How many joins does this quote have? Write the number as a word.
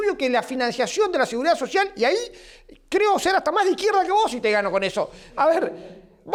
zero